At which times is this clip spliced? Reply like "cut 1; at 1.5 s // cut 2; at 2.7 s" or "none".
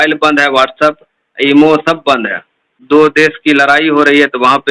cut 1; at 2.8 s